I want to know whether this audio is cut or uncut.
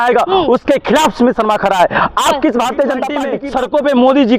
cut